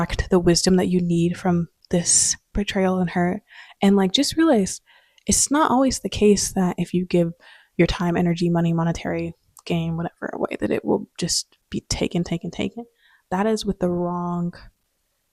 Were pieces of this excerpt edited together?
no; 0 cuts

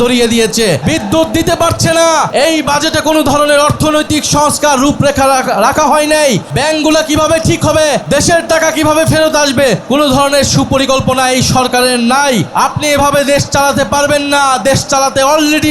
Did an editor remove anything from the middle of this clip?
yes; 6 cuts; at 0.8 s, 2.3 s, 6.5 s, 8.0 s, 9.8 s, 12.5 s

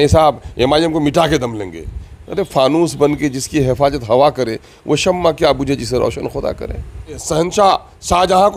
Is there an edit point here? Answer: yes; 1 cut; at 7.2 s

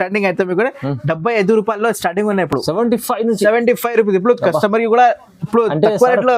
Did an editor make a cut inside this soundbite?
no; 0 cuts

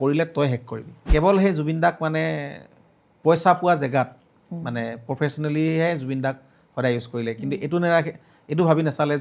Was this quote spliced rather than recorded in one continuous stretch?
yes; 1 cut; at 1.0 s

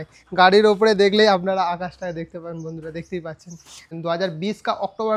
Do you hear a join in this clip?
yes; 1 cut; at 3.8 s

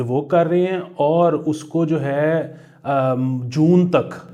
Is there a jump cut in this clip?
no; 0 cuts

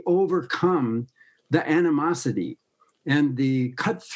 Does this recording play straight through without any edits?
yes; 0 cuts

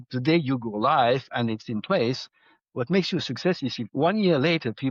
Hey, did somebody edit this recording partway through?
no; 0 cuts

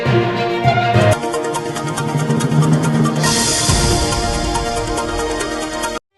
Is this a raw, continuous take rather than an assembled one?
yes; 0 cuts

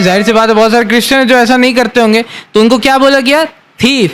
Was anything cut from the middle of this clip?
no; 0 cuts

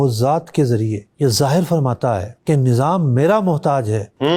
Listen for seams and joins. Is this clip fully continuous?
yes; 0 cuts

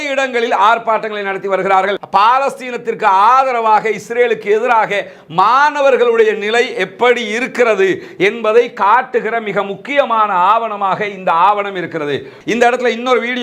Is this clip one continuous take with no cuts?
no; 2 cuts; at 2.0 s, 12.3 s

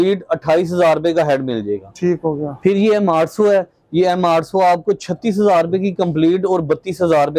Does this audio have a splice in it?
no; 0 cuts

